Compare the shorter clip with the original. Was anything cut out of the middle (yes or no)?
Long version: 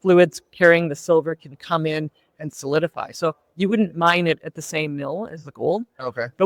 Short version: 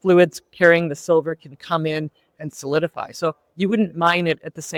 no